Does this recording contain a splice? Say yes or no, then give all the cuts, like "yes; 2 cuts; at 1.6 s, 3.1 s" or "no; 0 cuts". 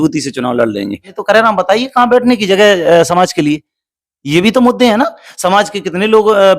yes; 1 cut; at 1.1 s